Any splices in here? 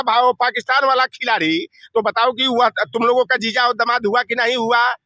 no; 0 cuts

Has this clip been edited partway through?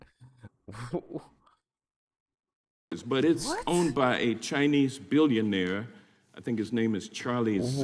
yes; 1 cut; at 2.7 s

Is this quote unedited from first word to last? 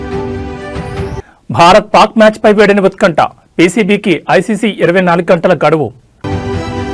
no; 2 cuts; at 1.1 s, 6.2 s

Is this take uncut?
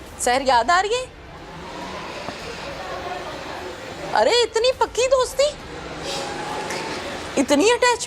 yes; 0 cuts

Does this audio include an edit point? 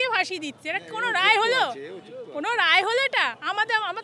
no; 0 cuts

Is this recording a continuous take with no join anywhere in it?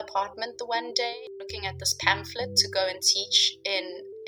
no; 1 cut; at 1.1 s

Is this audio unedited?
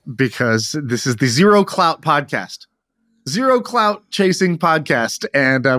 yes; 0 cuts

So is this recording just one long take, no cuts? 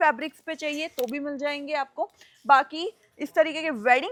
yes; 0 cuts

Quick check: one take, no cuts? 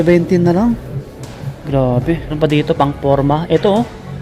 no; 1 cut; at 2.3 s

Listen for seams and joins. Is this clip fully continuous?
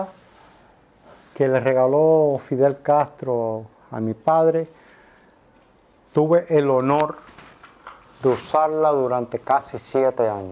yes; 0 cuts

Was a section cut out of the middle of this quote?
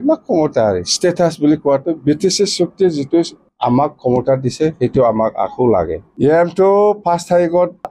yes; 1 cut; at 6.0 s

